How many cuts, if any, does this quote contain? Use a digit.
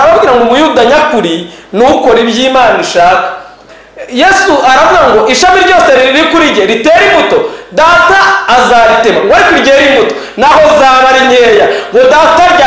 1